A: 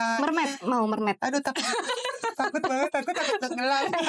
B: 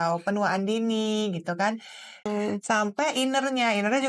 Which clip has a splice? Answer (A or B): B